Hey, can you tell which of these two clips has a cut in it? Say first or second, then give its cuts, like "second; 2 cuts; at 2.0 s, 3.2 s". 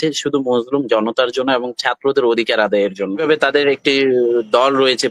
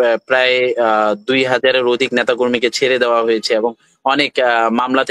first; 1 cut; at 3.2 s